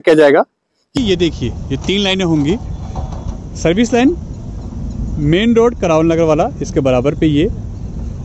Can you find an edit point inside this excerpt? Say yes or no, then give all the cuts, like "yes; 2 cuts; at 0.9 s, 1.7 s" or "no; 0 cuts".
yes; 1 cut; at 0.9 s